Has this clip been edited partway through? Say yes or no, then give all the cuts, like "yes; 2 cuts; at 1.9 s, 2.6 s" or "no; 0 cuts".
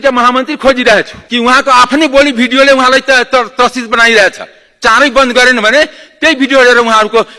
yes; 1 cut; at 1.2 s